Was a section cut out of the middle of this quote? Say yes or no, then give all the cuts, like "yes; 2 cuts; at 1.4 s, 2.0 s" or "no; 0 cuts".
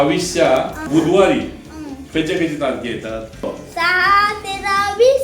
yes; 2 cuts; at 0.9 s, 3.4 s